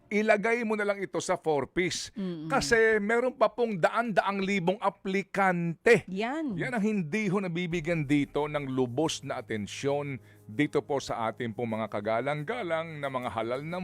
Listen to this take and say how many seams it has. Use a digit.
0